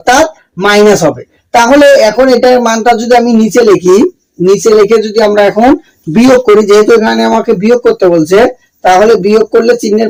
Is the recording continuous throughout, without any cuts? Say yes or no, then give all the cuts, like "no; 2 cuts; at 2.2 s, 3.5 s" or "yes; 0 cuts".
yes; 0 cuts